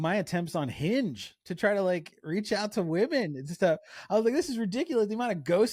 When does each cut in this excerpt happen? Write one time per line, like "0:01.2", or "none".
none